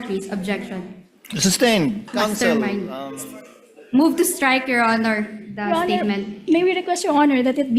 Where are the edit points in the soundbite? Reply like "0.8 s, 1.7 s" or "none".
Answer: 2.0 s, 4.2 s